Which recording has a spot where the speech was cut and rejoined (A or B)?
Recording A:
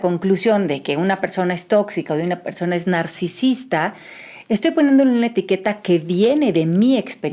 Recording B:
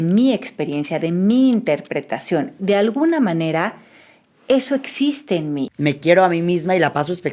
B